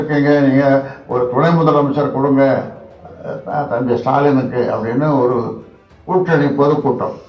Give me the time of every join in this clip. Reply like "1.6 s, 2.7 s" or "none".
none